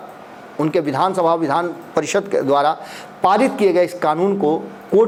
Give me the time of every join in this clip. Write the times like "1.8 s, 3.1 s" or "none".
none